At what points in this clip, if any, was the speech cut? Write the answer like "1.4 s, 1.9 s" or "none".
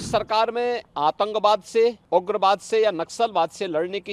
0.9 s, 2.0 s